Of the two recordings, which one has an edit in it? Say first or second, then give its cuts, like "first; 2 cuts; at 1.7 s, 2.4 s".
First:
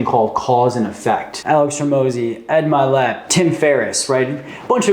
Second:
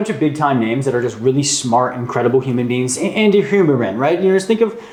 first; 2 cuts; at 1.3 s, 3.3 s